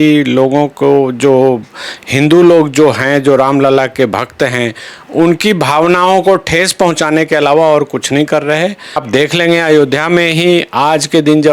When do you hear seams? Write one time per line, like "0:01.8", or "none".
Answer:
0:09.0